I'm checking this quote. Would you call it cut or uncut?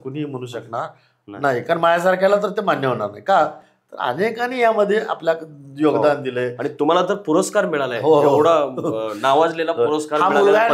uncut